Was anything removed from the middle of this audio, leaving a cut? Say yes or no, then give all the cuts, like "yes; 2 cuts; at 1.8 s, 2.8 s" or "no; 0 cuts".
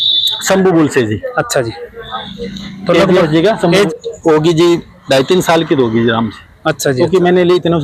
no; 0 cuts